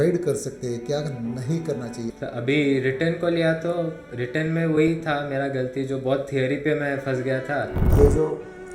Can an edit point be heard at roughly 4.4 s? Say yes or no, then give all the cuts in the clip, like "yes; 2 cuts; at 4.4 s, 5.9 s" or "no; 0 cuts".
no; 2 cuts; at 2.1 s, 7.9 s